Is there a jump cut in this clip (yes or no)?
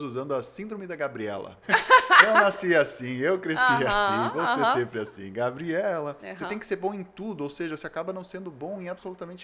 yes